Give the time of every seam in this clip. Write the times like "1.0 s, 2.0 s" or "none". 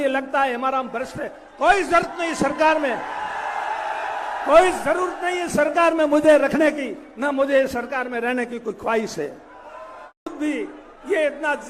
10.3 s